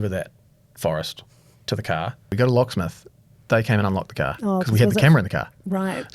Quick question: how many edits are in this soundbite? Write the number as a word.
one